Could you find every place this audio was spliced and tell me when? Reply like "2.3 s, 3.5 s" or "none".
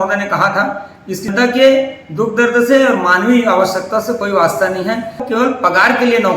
1.3 s, 5.2 s